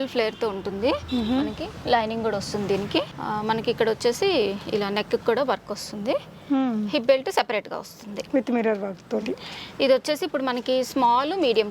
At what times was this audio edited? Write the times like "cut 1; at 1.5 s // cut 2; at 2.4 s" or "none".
none